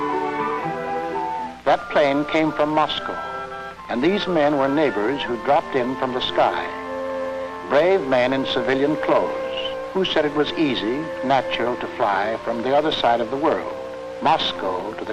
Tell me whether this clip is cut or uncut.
cut